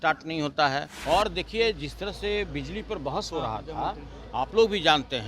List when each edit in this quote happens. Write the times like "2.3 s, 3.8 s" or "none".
0.9 s